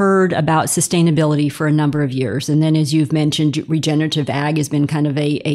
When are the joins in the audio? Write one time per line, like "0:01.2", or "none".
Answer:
none